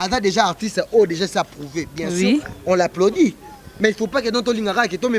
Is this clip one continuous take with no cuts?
yes; 0 cuts

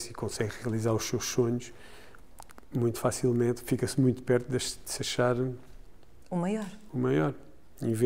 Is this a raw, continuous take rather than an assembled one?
yes; 0 cuts

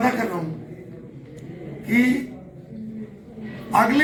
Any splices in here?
no; 0 cuts

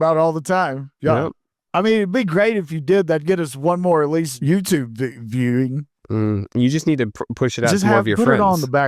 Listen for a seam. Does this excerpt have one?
yes; 1 cut; at 4.3 s

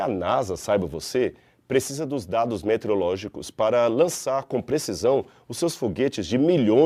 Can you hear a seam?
no; 0 cuts

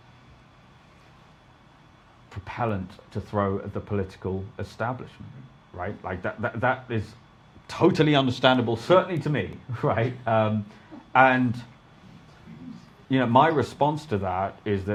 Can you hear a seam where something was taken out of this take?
no; 0 cuts

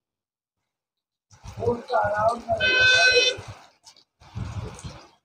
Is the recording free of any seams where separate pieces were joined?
yes; 0 cuts

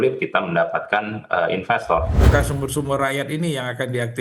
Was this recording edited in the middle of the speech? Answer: yes; 1 cut; at 2.2 s

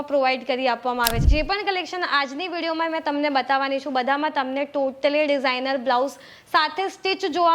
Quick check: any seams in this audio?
yes; 1 cut; at 1.3 s

